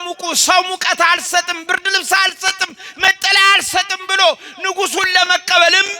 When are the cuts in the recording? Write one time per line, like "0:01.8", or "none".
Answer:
none

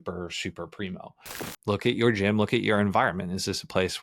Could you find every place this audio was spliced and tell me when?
0:01.4

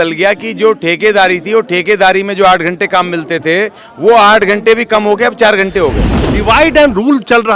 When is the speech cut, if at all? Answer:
0:06.3

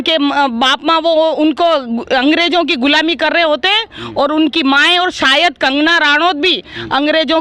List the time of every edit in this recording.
none

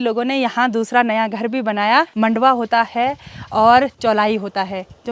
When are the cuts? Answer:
0:02.1

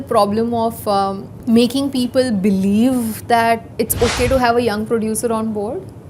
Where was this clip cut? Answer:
0:01.3
0:03.7

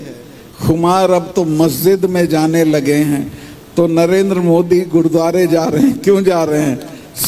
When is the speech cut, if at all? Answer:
none

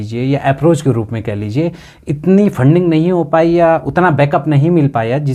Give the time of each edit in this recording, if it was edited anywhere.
none

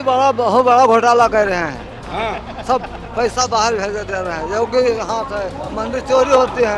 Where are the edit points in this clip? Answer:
none

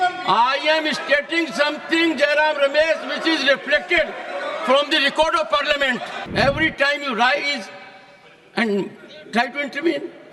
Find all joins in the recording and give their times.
0:06.2

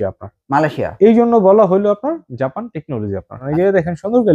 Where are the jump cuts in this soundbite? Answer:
0:03.4

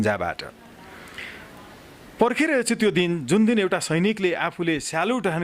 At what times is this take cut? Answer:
none

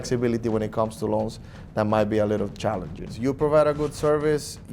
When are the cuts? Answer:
0:03.1

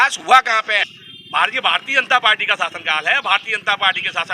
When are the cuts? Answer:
0:01.0

